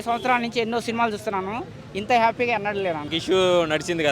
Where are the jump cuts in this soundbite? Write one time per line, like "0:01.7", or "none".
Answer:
0:03.1